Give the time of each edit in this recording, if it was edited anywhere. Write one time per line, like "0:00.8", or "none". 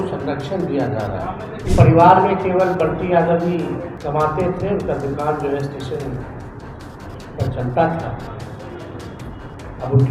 0:01.7
0:03.9